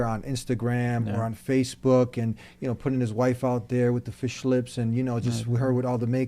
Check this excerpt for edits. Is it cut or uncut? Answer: uncut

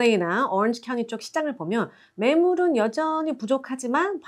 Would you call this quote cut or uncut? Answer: uncut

